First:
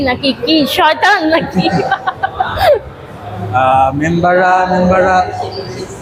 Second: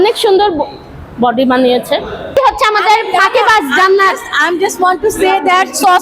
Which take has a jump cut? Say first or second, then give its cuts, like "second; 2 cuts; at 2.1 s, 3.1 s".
second; 1 cut; at 2.4 s